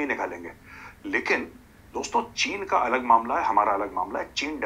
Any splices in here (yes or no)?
no